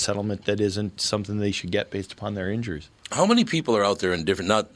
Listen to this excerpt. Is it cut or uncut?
uncut